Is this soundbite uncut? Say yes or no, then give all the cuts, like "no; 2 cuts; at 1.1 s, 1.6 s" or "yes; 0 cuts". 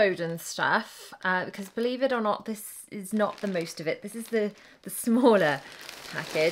yes; 0 cuts